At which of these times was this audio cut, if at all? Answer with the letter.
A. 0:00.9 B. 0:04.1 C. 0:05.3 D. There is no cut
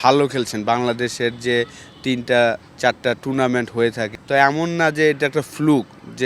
B